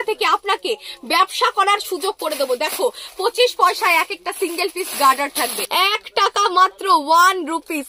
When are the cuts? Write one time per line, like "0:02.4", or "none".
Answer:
0:05.6